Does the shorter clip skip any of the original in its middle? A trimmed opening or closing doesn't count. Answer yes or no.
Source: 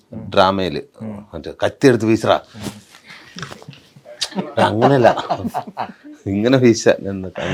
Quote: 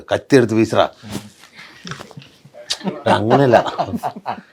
no